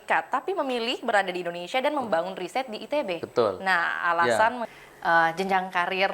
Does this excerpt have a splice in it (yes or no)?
yes